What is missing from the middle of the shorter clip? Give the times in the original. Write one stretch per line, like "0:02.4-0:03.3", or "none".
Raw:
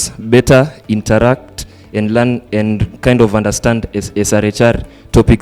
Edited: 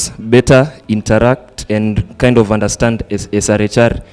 0:01.6-0:02.4